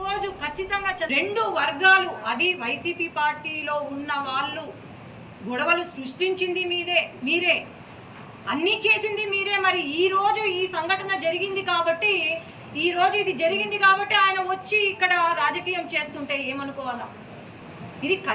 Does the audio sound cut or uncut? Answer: cut